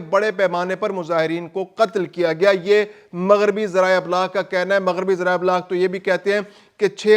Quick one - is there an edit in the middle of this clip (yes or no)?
no